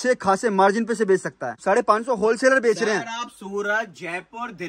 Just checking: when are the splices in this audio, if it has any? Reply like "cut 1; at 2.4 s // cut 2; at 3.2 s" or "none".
cut 1; at 1.5 s